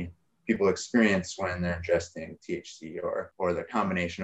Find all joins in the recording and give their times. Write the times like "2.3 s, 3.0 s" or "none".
3.3 s